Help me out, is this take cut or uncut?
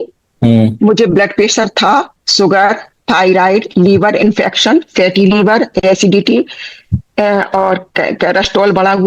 uncut